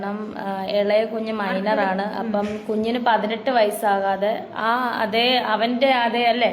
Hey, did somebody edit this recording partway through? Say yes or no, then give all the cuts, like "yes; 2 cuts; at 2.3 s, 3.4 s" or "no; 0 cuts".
no; 0 cuts